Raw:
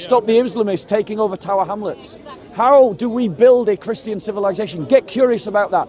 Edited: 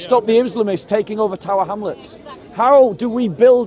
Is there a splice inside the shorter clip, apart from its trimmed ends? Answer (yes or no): no